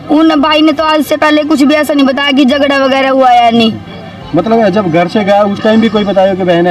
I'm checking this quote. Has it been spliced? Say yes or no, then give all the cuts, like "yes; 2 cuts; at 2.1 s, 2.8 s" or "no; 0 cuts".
no; 0 cuts